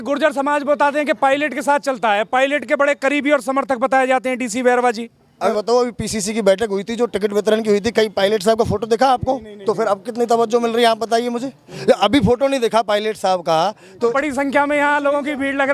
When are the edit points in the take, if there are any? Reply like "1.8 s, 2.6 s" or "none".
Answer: 5.5 s, 14.1 s